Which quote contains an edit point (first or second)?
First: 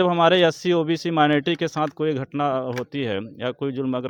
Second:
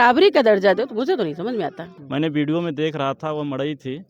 second